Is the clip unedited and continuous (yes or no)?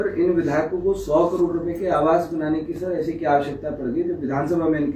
yes